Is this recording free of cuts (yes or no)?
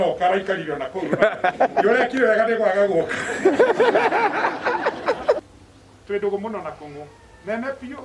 no